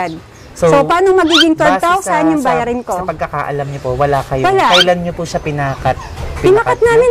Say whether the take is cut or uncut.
uncut